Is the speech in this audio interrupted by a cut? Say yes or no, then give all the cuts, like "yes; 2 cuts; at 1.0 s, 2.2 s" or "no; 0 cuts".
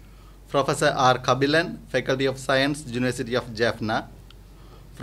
no; 0 cuts